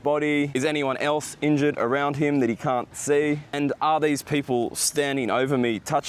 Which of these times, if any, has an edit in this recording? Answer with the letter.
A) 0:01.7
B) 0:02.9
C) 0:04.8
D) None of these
D